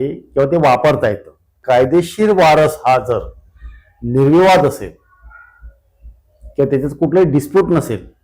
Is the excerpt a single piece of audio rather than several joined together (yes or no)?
no